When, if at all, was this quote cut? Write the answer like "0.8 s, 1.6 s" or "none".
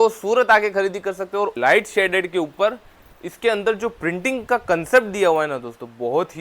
1.5 s